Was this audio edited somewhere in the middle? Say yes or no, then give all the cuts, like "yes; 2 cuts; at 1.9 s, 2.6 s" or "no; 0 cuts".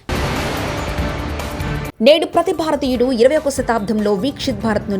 yes; 1 cut; at 1.9 s